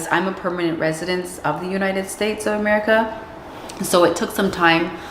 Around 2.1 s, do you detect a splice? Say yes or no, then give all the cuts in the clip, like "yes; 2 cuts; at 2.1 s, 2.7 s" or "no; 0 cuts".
yes; 1 cut; at 2.1 s